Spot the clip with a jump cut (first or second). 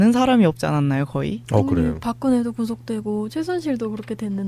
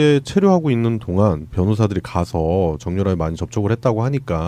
second